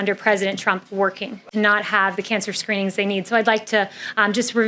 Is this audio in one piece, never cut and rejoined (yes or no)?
no